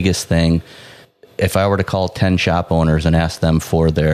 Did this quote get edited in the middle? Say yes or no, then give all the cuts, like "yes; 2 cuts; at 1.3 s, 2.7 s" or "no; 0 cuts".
yes; 1 cut; at 1.1 s